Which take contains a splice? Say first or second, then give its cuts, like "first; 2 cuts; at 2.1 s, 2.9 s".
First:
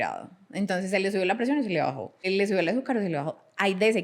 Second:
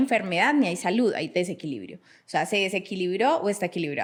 first; 1 cut; at 2.3 s